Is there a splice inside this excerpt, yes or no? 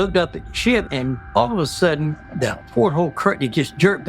yes